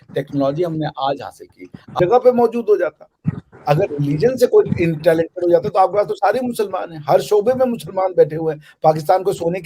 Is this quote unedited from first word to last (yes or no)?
no